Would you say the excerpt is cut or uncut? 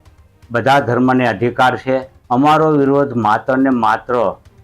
cut